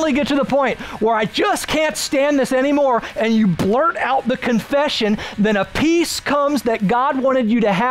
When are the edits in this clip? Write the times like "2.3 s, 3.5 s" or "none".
none